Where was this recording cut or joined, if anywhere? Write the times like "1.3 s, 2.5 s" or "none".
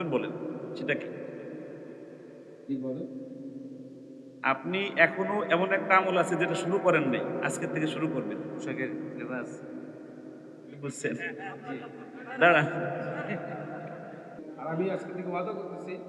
14.4 s